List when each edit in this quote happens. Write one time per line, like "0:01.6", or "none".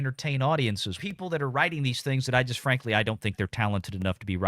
0:01.0